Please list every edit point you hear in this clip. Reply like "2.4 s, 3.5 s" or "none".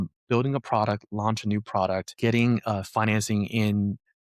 2.1 s